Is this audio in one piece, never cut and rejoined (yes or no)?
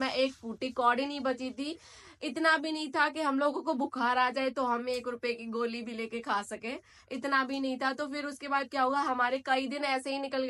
yes